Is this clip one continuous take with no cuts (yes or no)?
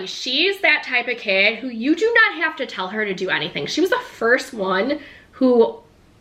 yes